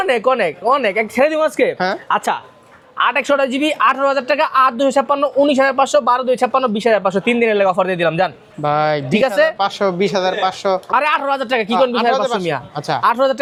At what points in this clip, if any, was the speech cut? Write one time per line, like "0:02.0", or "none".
none